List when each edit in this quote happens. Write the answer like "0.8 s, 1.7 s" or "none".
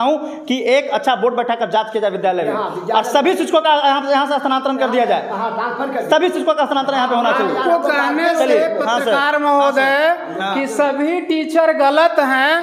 none